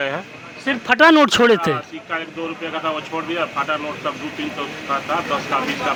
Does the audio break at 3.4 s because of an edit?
no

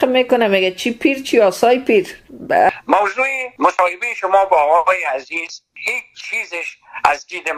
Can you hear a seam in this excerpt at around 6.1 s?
no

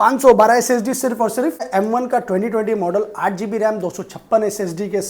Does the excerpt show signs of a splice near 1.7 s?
yes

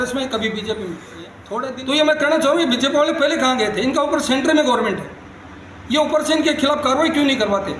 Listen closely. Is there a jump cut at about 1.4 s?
yes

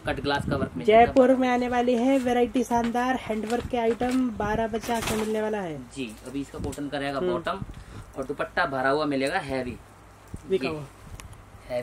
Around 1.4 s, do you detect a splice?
no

